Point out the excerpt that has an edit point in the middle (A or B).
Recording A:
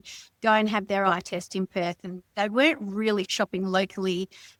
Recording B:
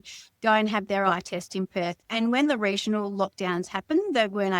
B